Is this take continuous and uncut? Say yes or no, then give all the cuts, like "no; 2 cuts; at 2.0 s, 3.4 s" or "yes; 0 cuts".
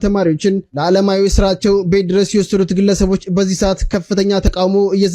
yes; 0 cuts